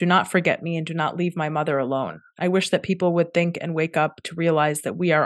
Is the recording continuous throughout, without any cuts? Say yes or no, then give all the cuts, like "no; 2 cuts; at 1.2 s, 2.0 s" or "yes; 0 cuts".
yes; 0 cuts